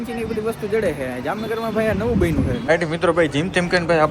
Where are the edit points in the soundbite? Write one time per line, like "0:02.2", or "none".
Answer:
0:02.6